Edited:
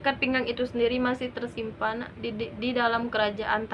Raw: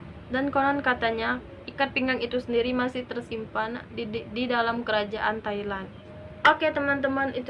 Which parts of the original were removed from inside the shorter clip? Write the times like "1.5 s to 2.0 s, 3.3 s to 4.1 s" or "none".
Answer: none